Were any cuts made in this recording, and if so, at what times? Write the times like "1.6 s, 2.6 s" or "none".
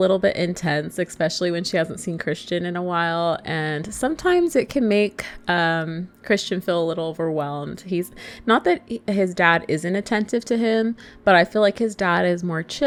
none